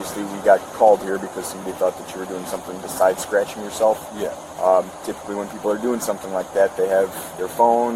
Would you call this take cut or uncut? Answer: uncut